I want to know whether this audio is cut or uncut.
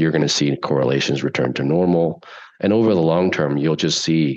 uncut